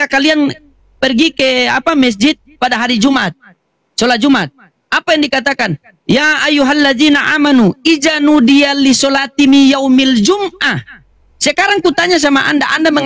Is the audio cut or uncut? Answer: cut